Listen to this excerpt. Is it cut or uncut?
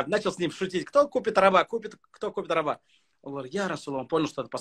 uncut